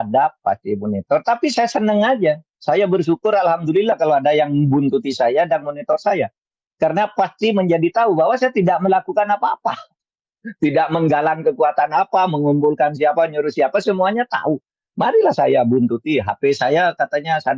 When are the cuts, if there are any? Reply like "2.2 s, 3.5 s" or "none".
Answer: none